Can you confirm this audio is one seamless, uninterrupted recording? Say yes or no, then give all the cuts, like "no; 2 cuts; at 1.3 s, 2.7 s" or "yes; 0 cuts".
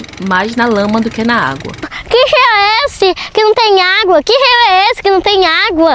no; 1 cut; at 2.0 s